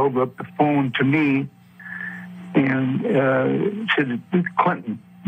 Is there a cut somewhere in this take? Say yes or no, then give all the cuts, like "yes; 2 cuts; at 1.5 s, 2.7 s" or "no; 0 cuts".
no; 0 cuts